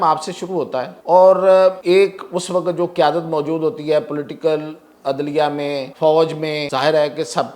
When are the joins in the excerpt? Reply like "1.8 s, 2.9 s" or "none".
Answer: 1.0 s, 1.8 s, 5.9 s, 6.6 s